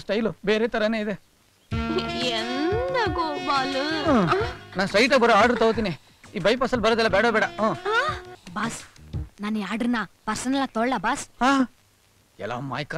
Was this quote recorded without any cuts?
no; 1 cut; at 8.4 s

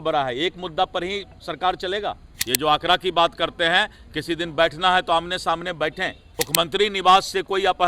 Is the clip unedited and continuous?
no; 2 cuts; at 2.3 s, 6.2 s

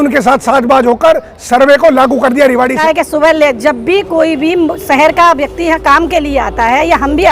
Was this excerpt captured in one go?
no; 1 cut; at 2.8 s

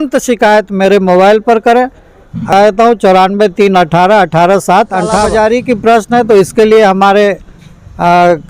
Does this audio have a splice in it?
yes; 2 cuts; at 2.5 s, 5.3 s

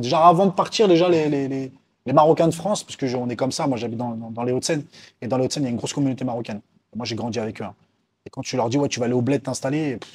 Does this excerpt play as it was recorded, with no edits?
yes; 0 cuts

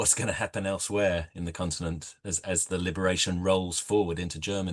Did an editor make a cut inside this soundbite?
no; 0 cuts

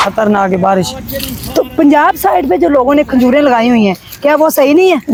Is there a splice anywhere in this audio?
no; 0 cuts

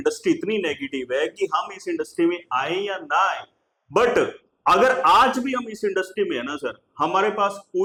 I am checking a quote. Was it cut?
no; 0 cuts

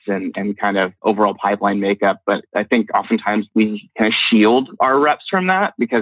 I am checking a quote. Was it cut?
yes; 3 cuts; at 1.0 s, 2.5 s, 3.5 s

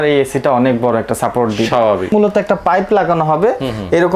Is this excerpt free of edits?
no; 1 cut; at 2.1 s

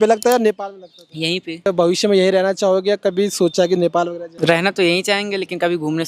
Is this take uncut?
no; 2 cuts; at 1.7 s, 4.2 s

